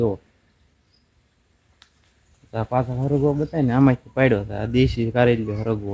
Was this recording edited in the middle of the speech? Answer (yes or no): no